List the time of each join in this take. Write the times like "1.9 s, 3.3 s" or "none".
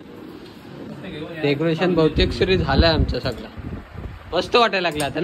none